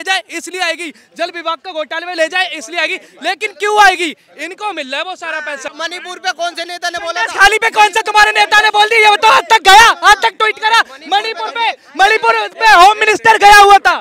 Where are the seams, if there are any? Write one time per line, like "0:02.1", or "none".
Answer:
0:05.7